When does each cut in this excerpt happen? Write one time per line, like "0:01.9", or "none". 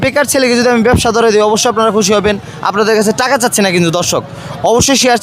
none